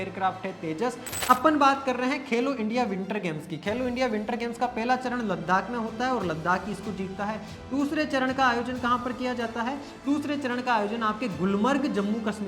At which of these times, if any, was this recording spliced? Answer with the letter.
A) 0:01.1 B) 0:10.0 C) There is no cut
A